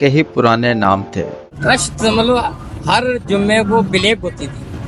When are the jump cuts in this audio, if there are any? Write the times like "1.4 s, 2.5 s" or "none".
1.5 s

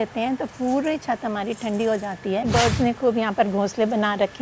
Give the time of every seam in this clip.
2.5 s

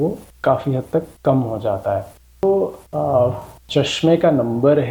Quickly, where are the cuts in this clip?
2.4 s

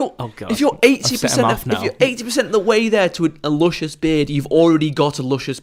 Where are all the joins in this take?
none

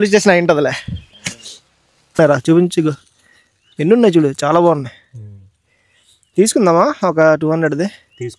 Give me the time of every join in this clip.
2.2 s

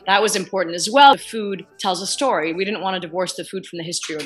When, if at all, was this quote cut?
none

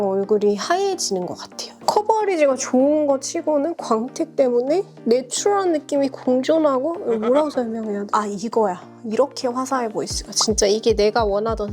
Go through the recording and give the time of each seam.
1.7 s, 8.1 s

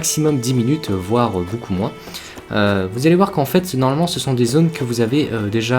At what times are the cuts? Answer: 4.4 s

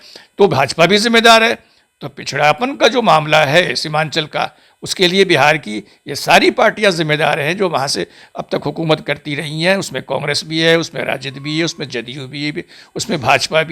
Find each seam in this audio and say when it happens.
none

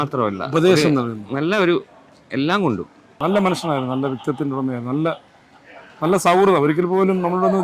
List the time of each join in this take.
3.1 s

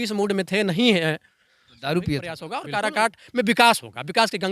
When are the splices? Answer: 2.5 s

